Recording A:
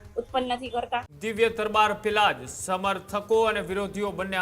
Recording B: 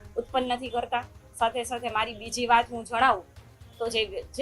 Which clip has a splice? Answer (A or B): A